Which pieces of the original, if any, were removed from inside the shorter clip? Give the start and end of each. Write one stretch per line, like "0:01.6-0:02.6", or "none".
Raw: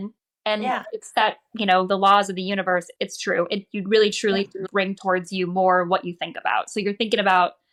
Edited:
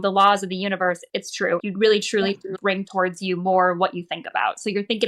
0:03.5-0:03.7

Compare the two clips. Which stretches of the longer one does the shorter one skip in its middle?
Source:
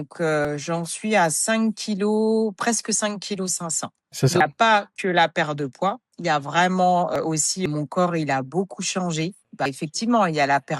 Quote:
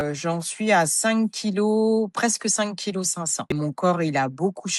0:03.9-0:07.6

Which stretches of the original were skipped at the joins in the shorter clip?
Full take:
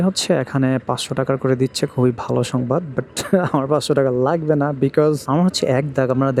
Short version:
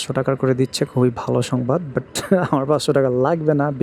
none

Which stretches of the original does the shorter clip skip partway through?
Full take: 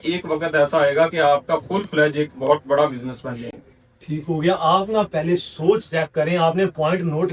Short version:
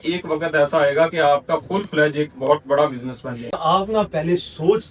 0:03.6-0:04.6

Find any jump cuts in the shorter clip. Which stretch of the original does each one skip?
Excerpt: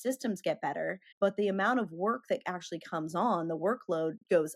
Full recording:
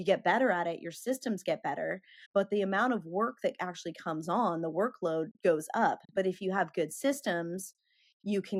0:02.1-0:02.2

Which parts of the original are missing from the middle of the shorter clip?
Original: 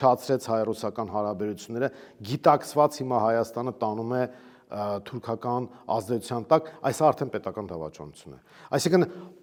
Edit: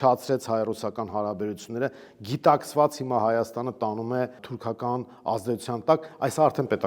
0:04.5-0:05.1

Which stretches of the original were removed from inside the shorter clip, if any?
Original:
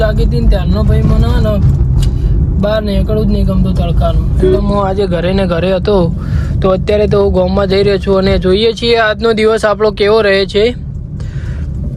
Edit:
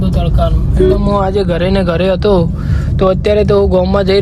none

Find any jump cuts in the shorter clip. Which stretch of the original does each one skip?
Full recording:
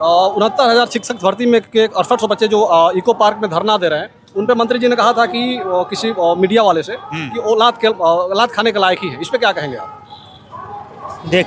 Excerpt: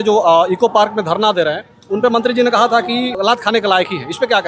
0:05.6-0:08.3

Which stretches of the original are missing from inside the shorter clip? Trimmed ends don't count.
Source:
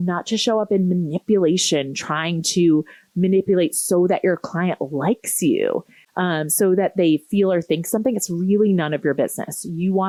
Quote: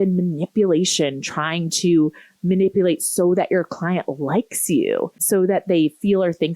0:05.9-0:06.5

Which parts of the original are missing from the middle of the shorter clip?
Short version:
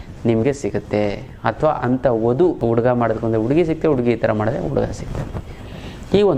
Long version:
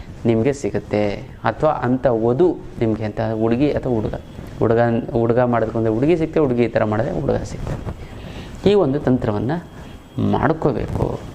0:02.6-0:05.1

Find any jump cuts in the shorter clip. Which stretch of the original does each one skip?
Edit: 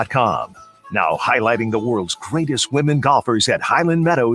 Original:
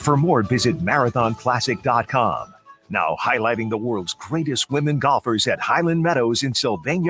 none

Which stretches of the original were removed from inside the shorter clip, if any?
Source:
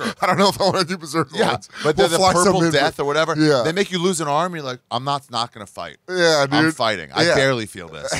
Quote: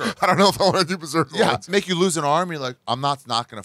0:01.7-0:03.7

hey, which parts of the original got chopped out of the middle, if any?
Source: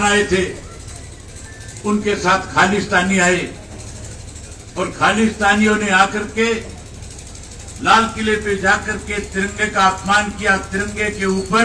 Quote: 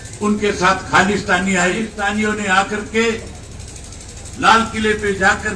0:03.5-0:05.3

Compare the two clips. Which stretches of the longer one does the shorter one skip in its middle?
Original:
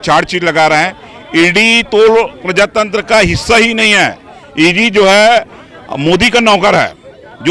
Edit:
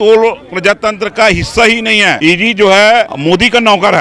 0:04.1-0:04.5
0:05.5-0:05.9

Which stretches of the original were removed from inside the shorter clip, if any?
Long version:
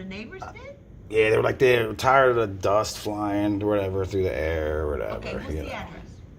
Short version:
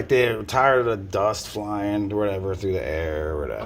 none

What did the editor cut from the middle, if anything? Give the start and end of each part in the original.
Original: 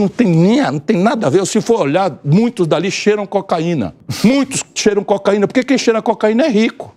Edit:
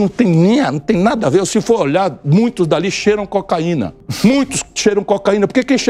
none

